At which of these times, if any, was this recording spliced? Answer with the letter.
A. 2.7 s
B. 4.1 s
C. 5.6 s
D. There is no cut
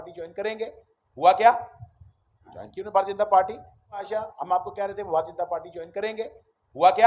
B